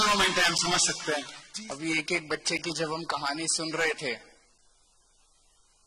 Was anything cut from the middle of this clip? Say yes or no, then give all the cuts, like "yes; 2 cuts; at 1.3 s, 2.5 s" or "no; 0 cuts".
yes; 1 cut; at 1.4 s